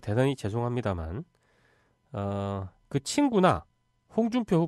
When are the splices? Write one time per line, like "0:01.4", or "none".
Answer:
0:03.0